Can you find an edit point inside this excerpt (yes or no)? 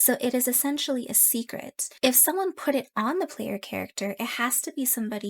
no